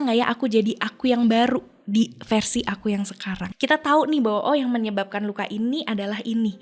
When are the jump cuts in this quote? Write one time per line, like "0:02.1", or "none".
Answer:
0:03.5